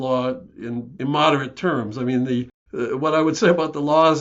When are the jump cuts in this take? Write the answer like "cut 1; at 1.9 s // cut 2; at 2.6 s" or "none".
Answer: cut 1; at 0.9 s // cut 2; at 2.6 s